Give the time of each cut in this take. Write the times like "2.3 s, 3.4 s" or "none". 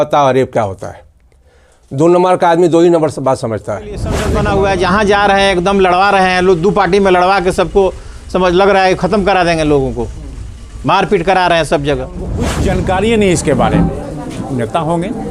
4.2 s, 12.5 s